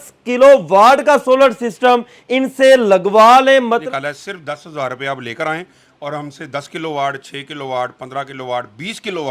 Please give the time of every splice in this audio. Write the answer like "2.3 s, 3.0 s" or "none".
3.8 s